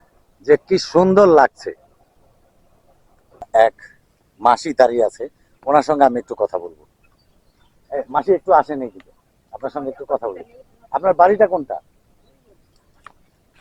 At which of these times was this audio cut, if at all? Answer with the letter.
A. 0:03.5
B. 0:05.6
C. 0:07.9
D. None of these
A